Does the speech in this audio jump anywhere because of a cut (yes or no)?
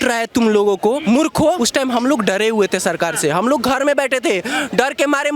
yes